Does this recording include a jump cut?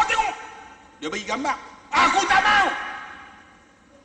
no; 0 cuts

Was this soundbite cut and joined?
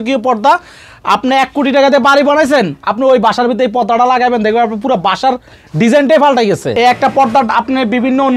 yes; 1 cut; at 6.7 s

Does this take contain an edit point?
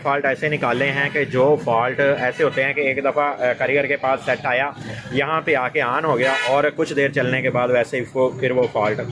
no; 0 cuts

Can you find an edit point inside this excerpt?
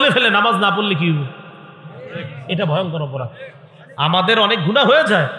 no; 0 cuts

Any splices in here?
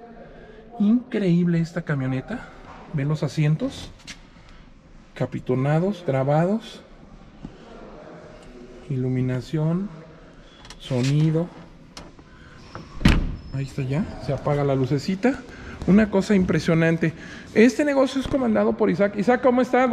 no; 0 cuts

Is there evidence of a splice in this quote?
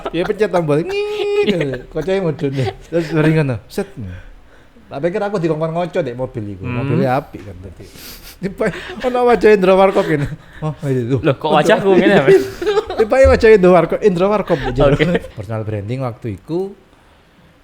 yes; 2 cuts; at 2.8 s, 15.4 s

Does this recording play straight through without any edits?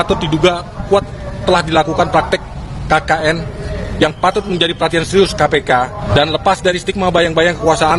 no; 1 cut; at 6.0 s

